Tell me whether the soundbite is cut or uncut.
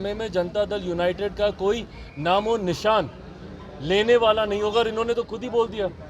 uncut